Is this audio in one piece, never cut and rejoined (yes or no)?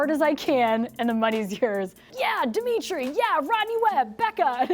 no